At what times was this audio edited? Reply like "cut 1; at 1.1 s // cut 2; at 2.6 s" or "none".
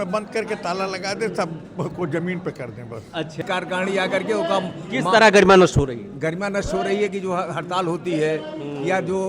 cut 1; at 3.4 s